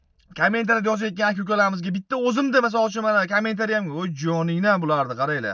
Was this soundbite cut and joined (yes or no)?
no